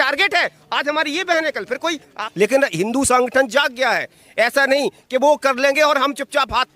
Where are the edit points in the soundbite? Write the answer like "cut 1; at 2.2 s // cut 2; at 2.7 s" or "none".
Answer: cut 1; at 2.2 s